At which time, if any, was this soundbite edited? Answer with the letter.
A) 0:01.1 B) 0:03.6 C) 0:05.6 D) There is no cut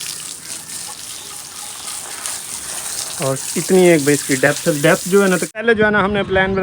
C